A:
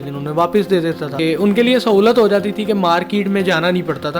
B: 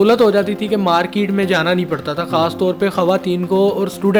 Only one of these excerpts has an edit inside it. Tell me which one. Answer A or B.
A